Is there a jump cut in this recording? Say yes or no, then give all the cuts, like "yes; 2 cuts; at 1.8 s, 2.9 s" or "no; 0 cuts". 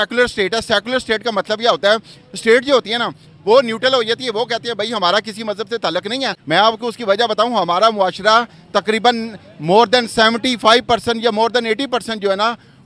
yes; 1 cut; at 6.4 s